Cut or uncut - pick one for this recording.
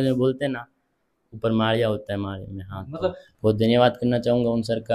cut